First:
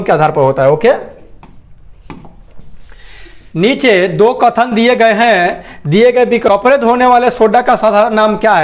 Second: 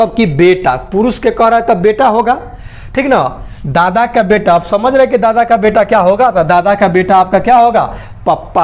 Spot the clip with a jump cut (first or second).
first